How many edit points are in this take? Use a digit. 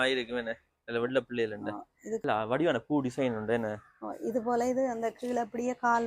1